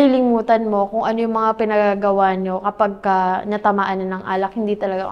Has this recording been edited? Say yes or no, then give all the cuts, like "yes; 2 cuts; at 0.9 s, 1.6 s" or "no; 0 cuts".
no; 0 cuts